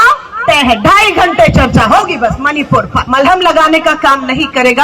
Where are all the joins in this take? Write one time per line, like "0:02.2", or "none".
0:03.0